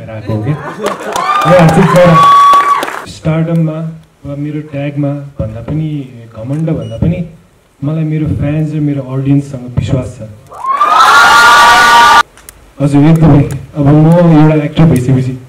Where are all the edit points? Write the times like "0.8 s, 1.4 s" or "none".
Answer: 3.0 s, 12.2 s